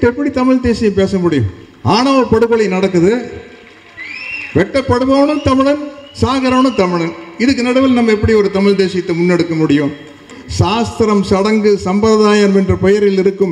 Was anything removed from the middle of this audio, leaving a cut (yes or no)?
yes